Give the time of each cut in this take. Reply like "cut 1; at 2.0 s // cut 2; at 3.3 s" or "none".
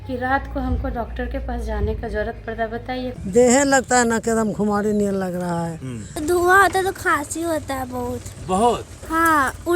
cut 1; at 3.1 s // cut 2; at 6.2 s